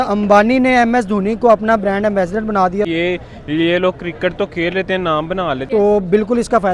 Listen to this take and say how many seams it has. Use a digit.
2